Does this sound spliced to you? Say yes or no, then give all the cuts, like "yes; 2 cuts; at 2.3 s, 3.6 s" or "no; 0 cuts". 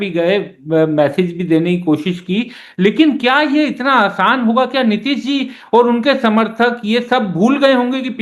no; 0 cuts